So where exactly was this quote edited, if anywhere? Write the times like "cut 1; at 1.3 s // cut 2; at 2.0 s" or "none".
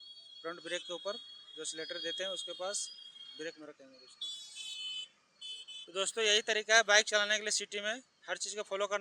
cut 1; at 5.8 s